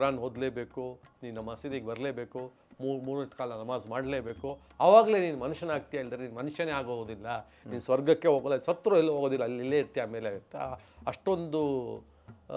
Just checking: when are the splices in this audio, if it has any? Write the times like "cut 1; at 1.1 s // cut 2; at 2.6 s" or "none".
none